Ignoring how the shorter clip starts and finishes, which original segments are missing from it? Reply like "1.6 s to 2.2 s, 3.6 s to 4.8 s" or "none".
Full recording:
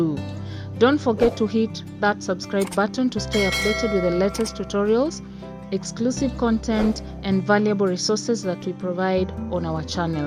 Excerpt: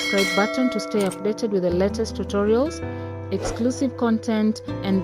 none